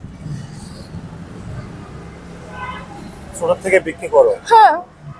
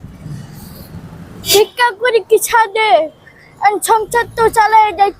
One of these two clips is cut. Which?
second; 1 cut; at 1.5 s

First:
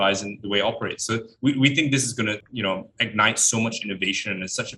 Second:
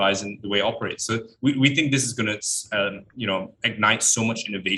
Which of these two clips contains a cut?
first; 1 cut; at 2.5 s

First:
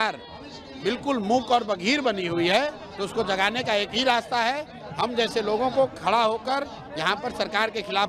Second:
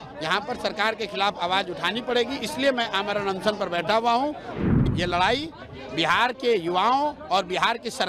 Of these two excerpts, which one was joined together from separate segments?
second; 1 cut; at 4.5 s

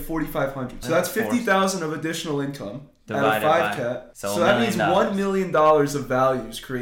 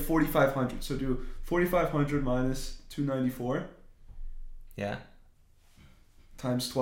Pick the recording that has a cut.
first; 2 cuts; at 0.8 s, 4.1 s

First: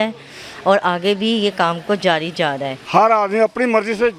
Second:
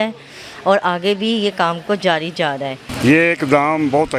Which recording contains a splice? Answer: first; 1 cut; at 2.7 s

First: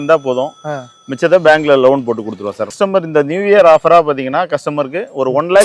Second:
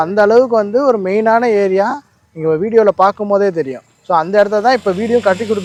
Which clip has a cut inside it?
first; 1 cut; at 2.8 s

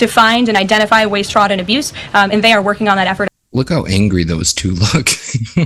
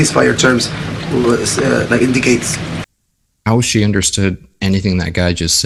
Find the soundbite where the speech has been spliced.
first; 1 cut; at 3.3 s

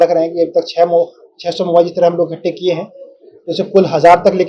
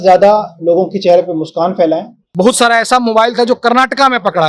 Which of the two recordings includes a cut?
second; 1 cut; at 2.3 s

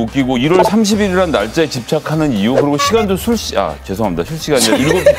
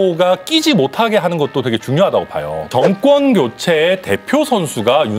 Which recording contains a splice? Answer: second; 1 cut; at 2.7 s

